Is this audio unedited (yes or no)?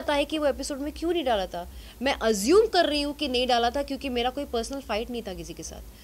yes